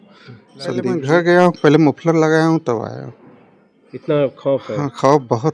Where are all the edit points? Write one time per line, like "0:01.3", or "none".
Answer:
0:00.9